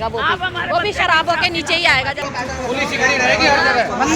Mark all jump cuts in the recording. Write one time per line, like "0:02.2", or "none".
0:02.3